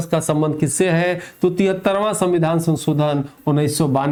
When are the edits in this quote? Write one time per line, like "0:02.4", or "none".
none